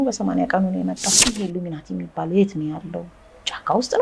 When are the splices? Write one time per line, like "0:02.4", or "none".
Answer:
0:01.1